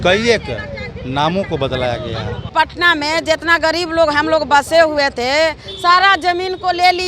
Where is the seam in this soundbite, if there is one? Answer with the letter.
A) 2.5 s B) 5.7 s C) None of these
A